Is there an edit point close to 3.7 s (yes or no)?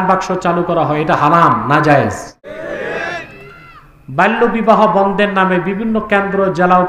no